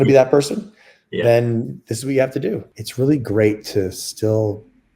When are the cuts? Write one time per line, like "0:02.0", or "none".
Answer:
0:02.8